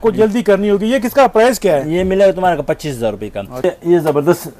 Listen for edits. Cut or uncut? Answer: cut